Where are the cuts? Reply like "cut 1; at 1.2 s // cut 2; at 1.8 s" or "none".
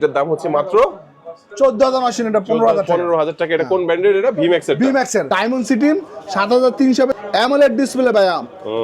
cut 1; at 5.3 s // cut 2; at 7.1 s